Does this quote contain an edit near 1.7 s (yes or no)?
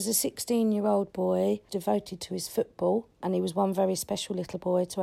yes